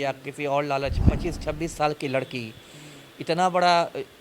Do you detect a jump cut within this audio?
yes; 1 cut; at 1.1 s

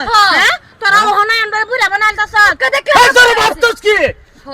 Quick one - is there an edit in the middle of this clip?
yes; 1 cut; at 2.6 s

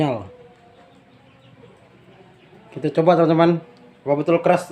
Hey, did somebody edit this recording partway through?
yes; 1 cut; at 1.9 s

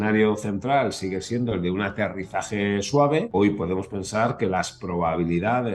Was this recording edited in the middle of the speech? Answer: yes; 1 cut; at 3.3 s

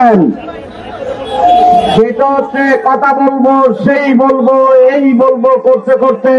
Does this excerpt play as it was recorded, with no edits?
yes; 0 cuts

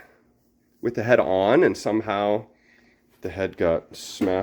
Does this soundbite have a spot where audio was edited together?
no; 0 cuts

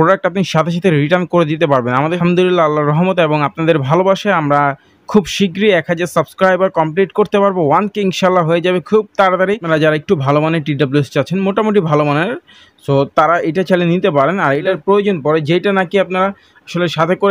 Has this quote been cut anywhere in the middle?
yes; 3 cuts; at 2.2 s, 9.6 s, 14.6 s

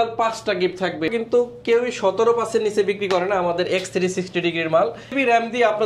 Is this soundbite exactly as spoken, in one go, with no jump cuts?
no; 2 cuts; at 1.1 s, 5.1 s

